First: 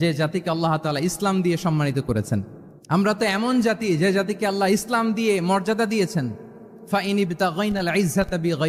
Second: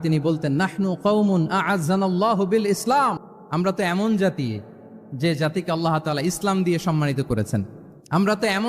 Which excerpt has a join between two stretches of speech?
second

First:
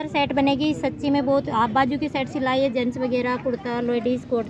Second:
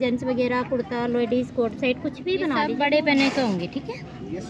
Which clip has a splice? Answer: second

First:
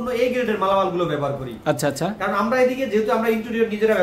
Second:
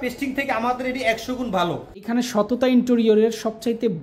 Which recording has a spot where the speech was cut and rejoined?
second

